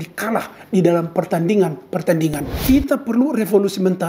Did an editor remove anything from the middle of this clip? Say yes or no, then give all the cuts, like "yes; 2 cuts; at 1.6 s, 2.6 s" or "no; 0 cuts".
yes; 1 cut; at 2.5 s